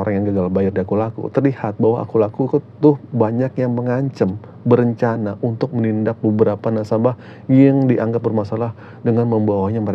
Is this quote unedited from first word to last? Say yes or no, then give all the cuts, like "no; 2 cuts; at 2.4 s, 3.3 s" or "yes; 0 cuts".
yes; 0 cuts